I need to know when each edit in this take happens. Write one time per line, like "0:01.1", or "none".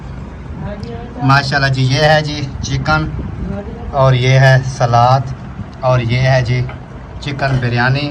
none